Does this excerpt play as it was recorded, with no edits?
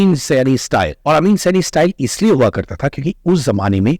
no; 1 cut; at 1.0 s

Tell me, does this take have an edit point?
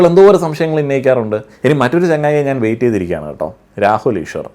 yes; 1 cut; at 1.5 s

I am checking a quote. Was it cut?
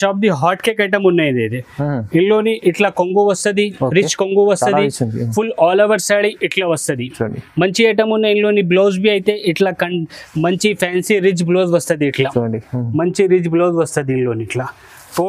no; 0 cuts

